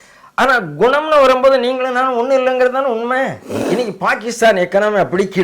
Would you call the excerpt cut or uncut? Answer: cut